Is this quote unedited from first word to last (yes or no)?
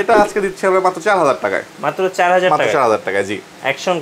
yes